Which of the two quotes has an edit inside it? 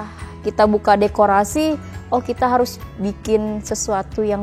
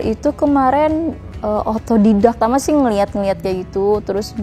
second; 1 cut; at 2.4 s

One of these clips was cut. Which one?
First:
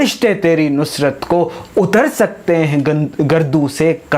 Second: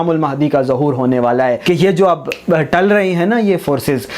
second; 1 cut; at 1.6 s

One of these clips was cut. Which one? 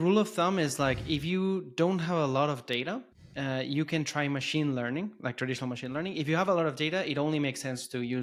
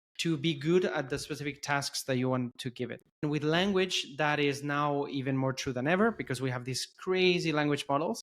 second; 1 cut; at 3.2 s

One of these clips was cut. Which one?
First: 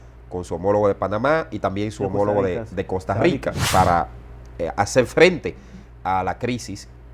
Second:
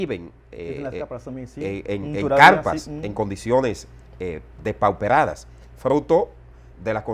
first; 1 cut; at 3.6 s

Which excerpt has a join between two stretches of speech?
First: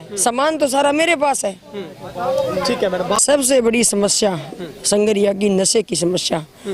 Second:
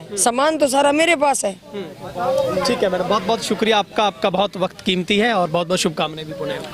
first; 1 cut; at 3.2 s

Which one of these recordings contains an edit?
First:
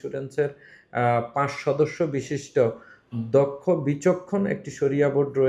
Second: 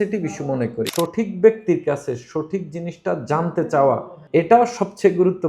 second; 2 cuts; at 0.9 s, 4.1 s

